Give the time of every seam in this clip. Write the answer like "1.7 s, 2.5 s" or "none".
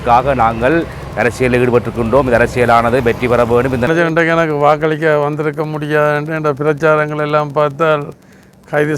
3.9 s